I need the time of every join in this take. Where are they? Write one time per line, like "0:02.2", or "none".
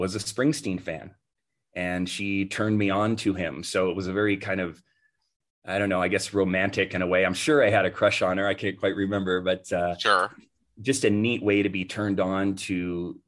none